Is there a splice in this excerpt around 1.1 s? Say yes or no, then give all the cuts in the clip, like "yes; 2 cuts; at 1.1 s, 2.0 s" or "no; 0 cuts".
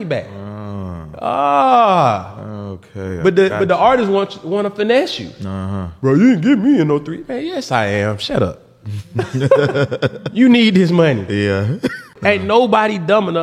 no; 1 cut; at 12.1 s